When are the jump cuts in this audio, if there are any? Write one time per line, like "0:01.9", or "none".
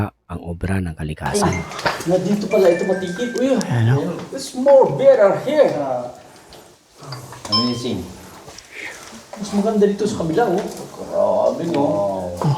0:01.2